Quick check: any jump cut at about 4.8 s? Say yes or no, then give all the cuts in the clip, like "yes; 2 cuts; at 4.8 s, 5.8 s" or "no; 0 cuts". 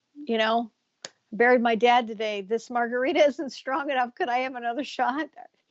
no; 0 cuts